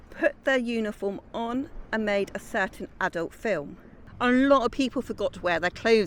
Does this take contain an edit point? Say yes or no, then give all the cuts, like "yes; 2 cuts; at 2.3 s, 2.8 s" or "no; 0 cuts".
yes; 1 cut; at 4.0 s